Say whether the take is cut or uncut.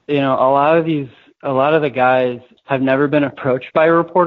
cut